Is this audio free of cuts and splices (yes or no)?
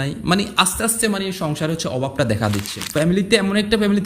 no